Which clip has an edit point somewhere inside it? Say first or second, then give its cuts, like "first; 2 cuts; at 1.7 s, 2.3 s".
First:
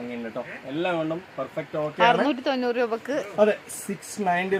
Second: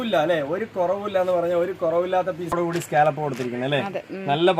second; 1 cut; at 2.5 s